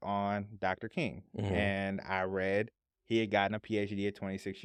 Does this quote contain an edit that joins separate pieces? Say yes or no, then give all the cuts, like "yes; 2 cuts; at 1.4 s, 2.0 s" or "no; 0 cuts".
no; 0 cuts